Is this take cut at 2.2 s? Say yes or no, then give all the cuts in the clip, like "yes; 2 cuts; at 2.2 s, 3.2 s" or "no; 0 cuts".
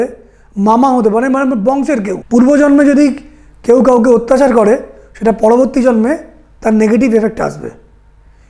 yes; 1 cut; at 2.2 s